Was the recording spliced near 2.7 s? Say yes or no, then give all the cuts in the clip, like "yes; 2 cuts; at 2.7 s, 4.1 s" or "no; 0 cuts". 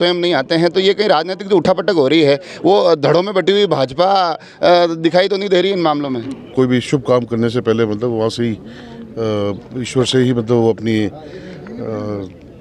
no; 1 cut; at 6.5 s